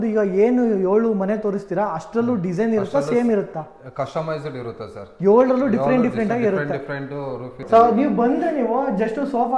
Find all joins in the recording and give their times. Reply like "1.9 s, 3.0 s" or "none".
7.6 s

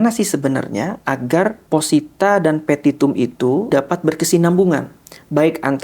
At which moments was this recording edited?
1.6 s, 3.7 s

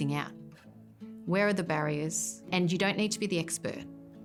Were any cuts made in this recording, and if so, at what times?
none

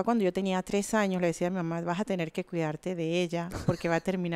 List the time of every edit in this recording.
none

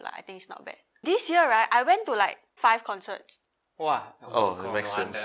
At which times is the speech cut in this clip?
1.0 s, 2.4 s

